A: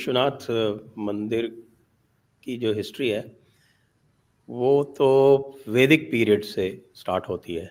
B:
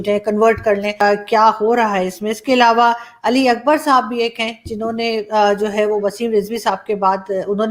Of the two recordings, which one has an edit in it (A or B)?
B